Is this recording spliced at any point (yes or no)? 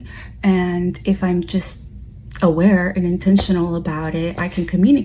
no